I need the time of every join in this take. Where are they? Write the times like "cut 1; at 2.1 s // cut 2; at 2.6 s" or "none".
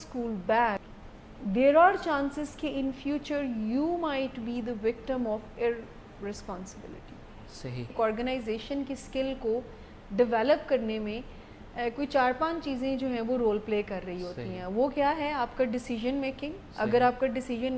cut 1; at 0.9 s // cut 2; at 7.9 s